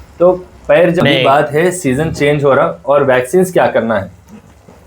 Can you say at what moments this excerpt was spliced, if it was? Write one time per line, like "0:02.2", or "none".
0:01.0